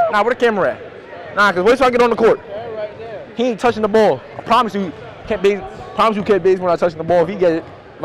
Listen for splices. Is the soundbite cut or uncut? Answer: uncut